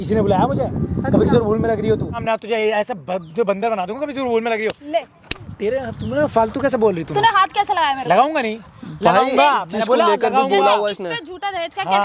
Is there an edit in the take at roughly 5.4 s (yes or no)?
no